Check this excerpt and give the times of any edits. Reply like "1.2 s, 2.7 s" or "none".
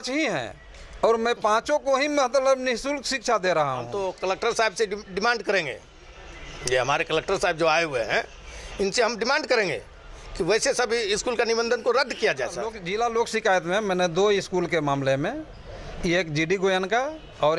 4.0 s, 12.8 s